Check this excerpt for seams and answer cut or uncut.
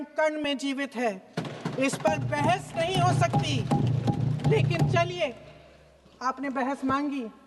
uncut